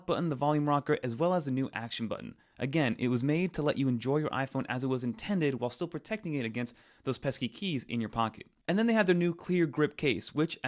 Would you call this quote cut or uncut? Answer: cut